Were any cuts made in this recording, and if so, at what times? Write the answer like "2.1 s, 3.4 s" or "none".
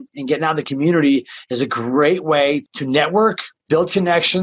2.7 s, 3.5 s